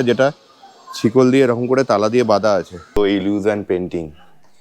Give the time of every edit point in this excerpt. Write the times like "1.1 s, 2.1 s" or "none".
2.8 s